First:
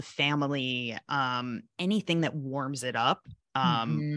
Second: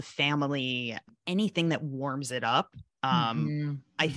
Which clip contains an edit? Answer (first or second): second